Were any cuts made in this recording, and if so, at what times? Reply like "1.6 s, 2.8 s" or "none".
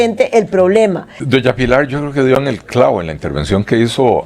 1.1 s